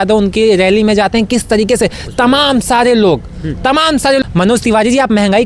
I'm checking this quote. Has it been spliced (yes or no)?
yes